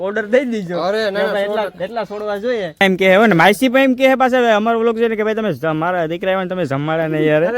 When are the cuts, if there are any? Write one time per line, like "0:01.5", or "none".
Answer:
0:02.8

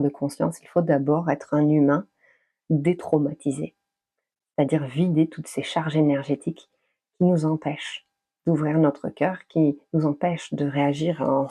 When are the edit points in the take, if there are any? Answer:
none

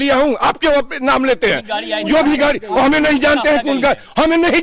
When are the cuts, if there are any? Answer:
none

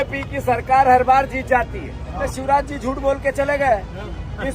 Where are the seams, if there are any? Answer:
0:02.3

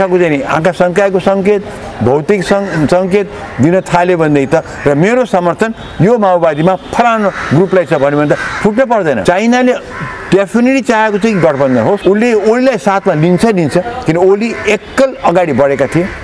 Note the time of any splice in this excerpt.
0:09.2
0:12.0

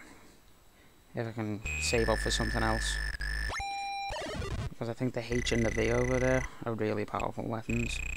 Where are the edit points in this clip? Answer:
0:04.6

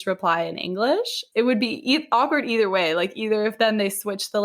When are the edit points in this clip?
0:01.2

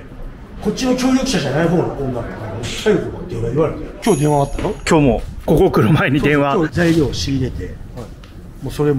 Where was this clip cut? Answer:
0:03.9
0:06.7

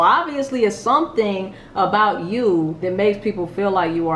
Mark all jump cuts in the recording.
0:02.8

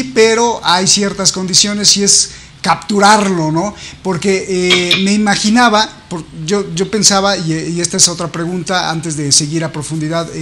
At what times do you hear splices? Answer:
none

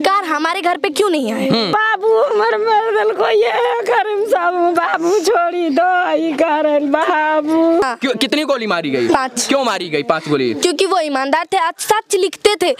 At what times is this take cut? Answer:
0:01.7
0:07.8

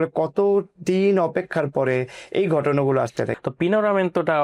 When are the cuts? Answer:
0:03.3

